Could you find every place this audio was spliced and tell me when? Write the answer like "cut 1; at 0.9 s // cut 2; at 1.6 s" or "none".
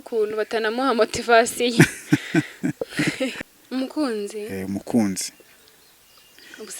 cut 1; at 3.3 s